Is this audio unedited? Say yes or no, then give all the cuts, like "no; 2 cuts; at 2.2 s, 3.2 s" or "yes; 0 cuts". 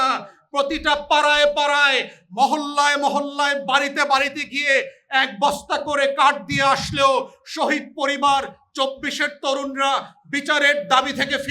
yes; 0 cuts